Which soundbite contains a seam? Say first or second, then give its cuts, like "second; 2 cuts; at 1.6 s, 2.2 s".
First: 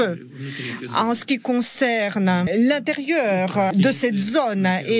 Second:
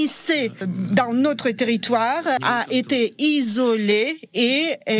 first; 1 cut; at 2.5 s